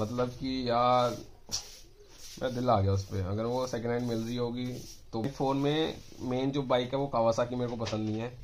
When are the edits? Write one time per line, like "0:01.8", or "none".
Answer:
0:05.2